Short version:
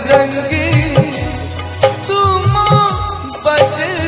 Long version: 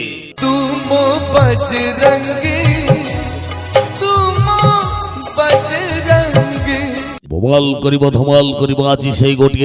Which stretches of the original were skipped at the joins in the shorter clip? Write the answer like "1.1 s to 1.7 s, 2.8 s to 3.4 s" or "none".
none